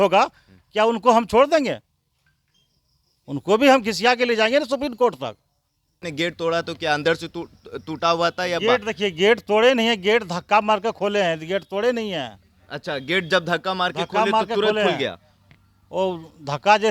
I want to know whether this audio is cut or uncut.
cut